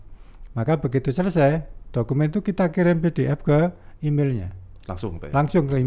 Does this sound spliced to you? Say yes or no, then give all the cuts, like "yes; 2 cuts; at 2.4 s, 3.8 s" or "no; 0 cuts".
no; 0 cuts